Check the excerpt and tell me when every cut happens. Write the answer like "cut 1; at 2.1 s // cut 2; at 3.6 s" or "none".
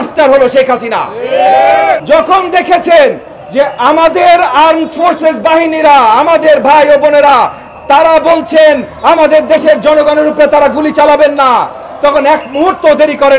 cut 1; at 2.0 s

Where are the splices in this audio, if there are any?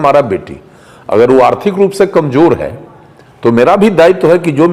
none

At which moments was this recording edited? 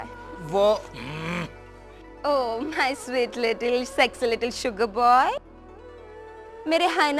none

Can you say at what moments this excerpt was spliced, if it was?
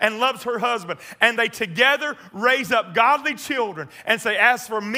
none

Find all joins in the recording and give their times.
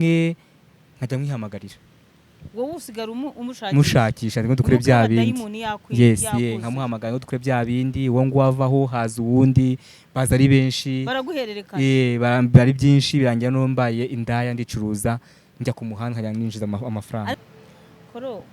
cut 1; at 17.4 s

